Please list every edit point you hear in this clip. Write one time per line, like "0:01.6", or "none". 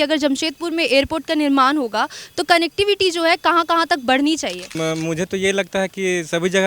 0:04.7